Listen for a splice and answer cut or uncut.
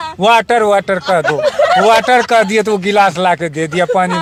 uncut